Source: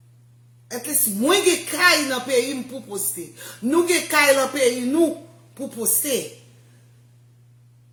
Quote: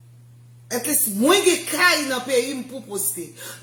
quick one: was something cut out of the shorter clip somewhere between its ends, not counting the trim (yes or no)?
no